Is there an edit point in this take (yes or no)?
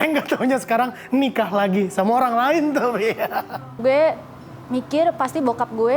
yes